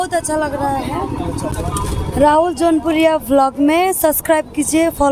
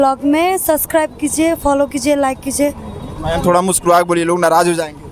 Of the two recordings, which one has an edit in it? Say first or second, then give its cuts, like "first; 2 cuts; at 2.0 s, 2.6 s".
first; 1 cut; at 1.5 s